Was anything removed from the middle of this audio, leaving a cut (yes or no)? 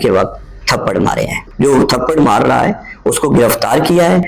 yes